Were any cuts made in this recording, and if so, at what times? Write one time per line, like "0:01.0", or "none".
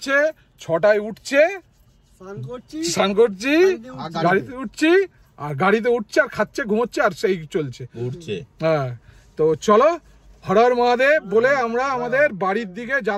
none